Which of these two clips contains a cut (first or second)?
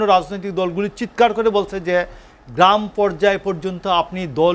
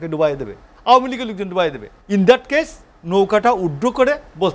second